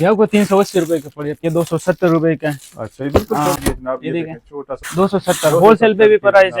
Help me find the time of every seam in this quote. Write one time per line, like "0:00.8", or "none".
0:01.4
0:03.6
0:04.8

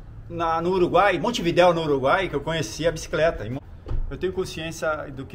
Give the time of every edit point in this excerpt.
0:03.9

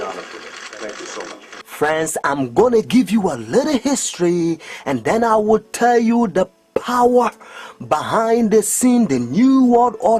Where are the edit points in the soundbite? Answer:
0:07.4

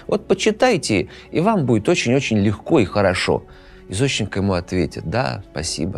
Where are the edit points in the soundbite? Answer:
none

